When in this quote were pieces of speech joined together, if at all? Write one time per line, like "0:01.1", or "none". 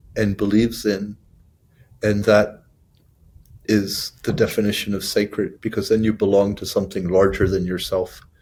none